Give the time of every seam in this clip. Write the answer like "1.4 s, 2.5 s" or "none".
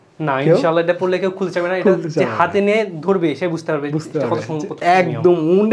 none